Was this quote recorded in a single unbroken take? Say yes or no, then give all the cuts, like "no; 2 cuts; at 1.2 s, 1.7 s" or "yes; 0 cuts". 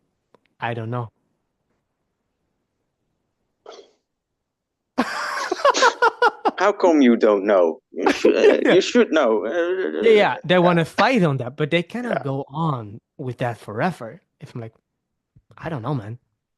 yes; 0 cuts